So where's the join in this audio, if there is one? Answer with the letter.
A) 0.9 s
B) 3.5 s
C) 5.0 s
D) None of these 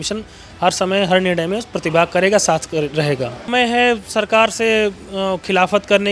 B